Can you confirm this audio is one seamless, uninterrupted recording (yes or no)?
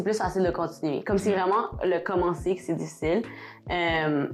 yes